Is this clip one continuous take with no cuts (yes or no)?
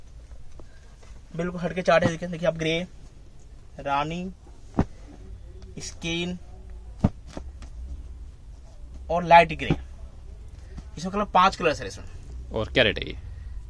yes